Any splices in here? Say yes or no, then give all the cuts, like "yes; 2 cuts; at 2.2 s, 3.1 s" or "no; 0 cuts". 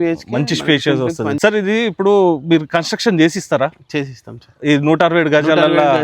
yes; 1 cut; at 1.4 s